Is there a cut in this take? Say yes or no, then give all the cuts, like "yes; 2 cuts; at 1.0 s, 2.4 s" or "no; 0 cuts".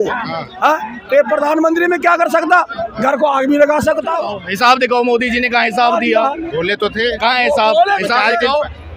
yes; 1 cut; at 4.2 s